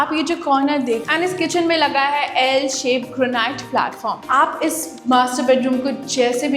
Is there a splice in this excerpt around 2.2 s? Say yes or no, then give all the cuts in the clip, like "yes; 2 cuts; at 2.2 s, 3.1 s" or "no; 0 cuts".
no; 2 cuts; at 1.0 s, 4.2 s